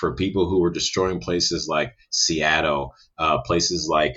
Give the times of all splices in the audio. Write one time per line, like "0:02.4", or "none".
none